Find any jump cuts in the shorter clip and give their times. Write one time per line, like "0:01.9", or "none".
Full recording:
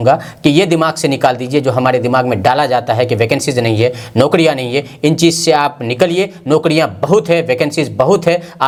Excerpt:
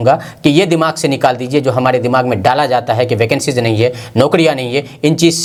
none